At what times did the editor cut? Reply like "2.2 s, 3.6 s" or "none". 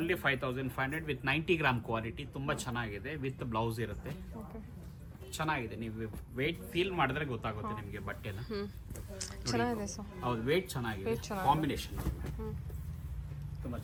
none